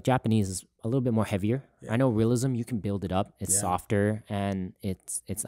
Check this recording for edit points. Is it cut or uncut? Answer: uncut